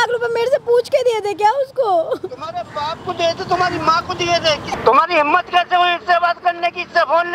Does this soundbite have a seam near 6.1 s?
no; 1 cut; at 4.7 s

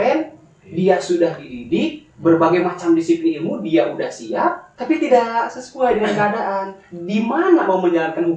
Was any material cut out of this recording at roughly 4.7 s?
yes; 1 cut; at 4.7 s

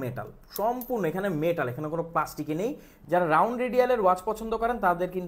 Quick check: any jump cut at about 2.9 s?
yes; 1 cut; at 2.9 s

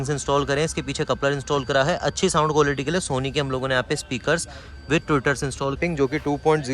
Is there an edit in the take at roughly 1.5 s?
no; 1 cut; at 5.8 s

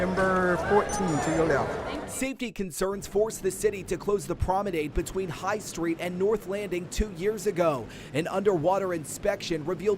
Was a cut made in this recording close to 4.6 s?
no; 1 cut; at 2.0 s

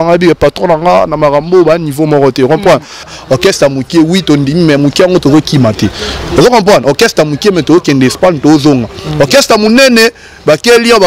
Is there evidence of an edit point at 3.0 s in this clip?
yes; 1 cut; at 3.0 s

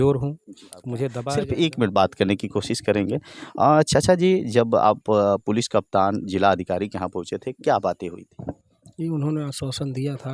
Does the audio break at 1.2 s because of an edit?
yes; 1 cut; at 1.2 s

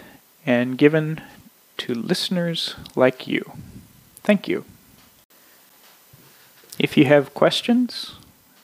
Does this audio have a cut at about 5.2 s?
yes; 1 cut; at 5.2 s

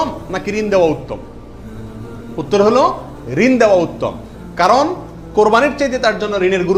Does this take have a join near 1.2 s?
no; 0 cuts

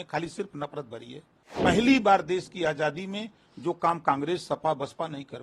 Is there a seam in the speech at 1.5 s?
yes; 1 cut; at 1.5 s

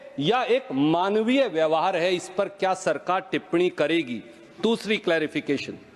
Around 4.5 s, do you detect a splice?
no; 0 cuts

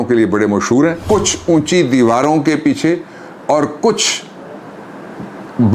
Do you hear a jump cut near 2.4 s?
no; 1 cut; at 1.0 s

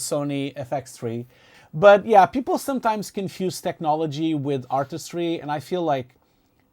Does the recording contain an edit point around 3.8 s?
no; 1 cut; at 1.6 s

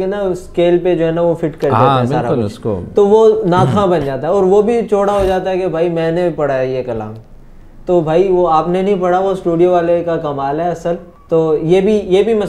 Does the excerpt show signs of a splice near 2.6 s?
no; 1 cut; at 11.1 s

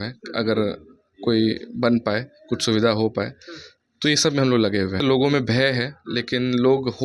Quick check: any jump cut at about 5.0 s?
yes; 1 cut; at 5.0 s

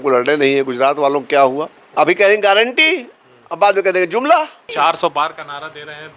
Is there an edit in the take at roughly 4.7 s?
yes; 2 cuts; at 1.8 s, 4.7 s

